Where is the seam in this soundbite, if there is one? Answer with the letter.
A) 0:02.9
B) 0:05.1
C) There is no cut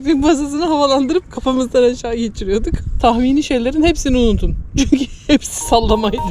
A